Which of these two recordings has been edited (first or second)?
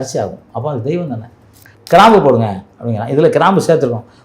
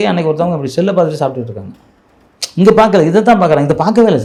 first